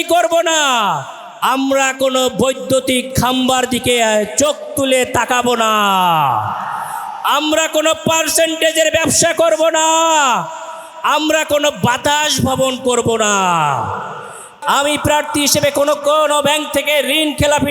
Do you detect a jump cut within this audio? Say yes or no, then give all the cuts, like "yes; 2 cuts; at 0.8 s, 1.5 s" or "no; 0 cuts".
yes; 1 cut; at 14.6 s